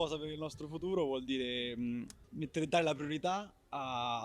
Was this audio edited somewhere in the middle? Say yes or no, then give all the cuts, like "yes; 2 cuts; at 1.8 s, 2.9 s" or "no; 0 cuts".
yes; 1 cut; at 2.2 s